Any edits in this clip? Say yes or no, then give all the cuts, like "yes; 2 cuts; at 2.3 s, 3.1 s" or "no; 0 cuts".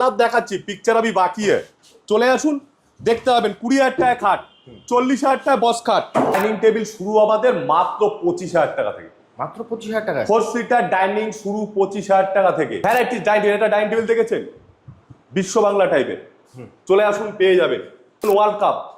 yes; 3 cuts; at 6.3 s, 12.7 s, 18.2 s